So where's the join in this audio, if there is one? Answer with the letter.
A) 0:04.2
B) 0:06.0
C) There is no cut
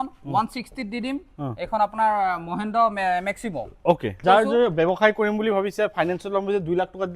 A